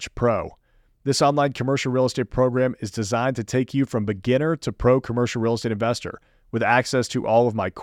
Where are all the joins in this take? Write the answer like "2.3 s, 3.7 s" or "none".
none